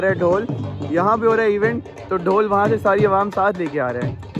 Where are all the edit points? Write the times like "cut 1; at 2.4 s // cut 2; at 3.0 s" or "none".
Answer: none